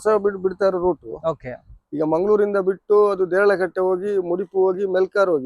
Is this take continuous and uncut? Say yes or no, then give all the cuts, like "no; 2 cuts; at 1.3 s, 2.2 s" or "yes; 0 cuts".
yes; 0 cuts